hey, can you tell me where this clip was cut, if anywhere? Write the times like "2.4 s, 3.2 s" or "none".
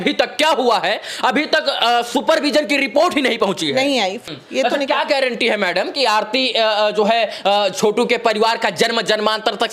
4.2 s

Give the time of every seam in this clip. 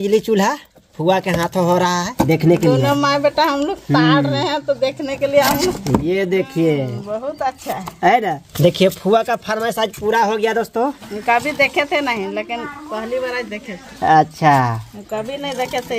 2.0 s, 5.8 s, 8.5 s, 11.0 s

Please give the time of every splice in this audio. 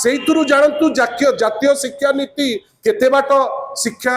none

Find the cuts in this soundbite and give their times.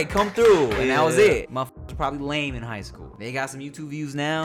1.5 s, 3.1 s

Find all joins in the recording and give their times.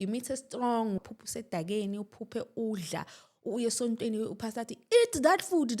1.0 s

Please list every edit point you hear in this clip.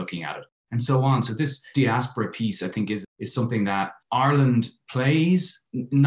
3.0 s

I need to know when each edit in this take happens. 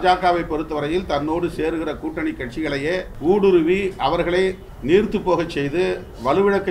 3.1 s, 4.7 s

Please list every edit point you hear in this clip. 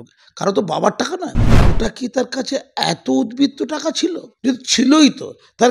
1.5 s, 4.3 s

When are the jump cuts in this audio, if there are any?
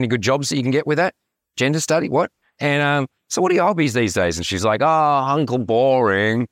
2.5 s

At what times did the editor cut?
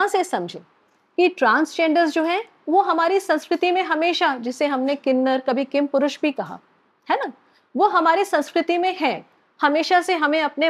none

